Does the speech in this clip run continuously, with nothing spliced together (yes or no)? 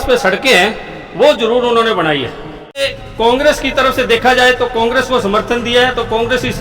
no